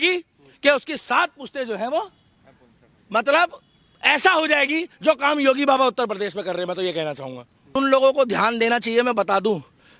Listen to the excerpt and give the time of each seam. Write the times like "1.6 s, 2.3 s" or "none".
7.8 s